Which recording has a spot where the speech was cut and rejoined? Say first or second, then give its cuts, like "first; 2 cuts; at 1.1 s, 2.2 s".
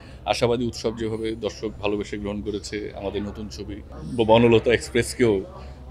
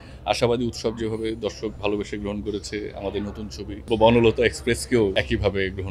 second; 2 cuts; at 3.8 s, 5.1 s